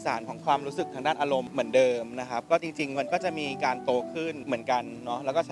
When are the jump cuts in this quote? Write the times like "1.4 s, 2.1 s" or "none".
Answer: 1.5 s, 4.4 s